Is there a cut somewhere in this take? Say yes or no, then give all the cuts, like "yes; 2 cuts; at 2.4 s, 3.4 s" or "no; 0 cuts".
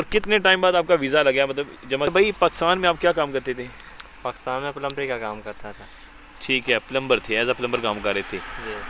yes; 1 cut; at 2.1 s